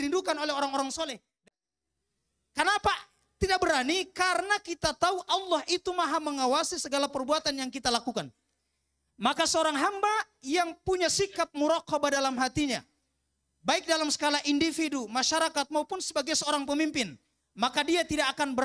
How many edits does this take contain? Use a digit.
1